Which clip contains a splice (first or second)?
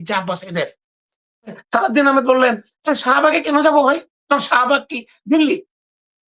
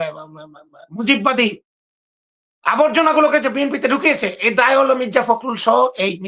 first